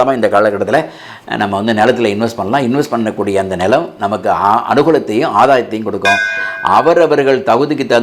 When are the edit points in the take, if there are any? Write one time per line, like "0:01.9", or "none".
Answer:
0:06.4